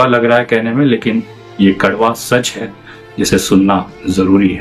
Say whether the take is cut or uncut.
uncut